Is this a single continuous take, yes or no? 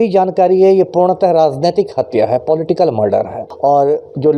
no